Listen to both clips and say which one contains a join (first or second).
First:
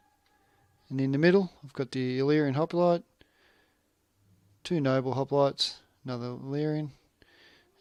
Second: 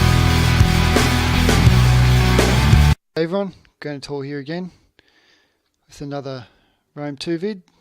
second